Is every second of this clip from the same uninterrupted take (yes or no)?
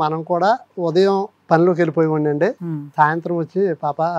yes